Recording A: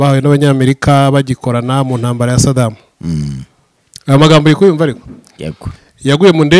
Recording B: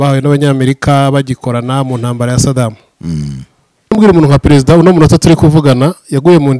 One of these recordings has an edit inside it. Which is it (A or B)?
B